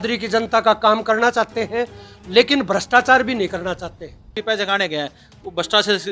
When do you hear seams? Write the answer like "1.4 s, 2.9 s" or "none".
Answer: 4.3 s